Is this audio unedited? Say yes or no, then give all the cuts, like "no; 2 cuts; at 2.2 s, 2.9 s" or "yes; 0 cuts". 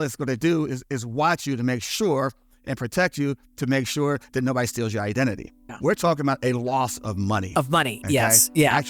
yes; 0 cuts